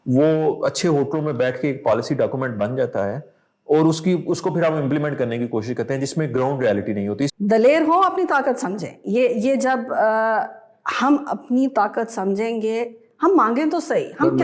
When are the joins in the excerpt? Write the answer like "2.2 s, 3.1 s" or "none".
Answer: 7.3 s